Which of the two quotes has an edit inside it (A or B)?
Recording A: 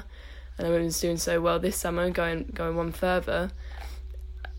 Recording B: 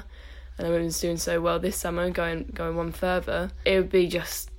B